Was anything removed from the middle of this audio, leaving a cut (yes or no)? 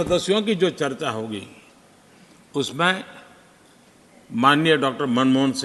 no